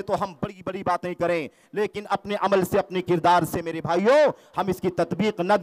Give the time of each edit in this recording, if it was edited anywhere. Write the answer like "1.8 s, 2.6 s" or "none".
none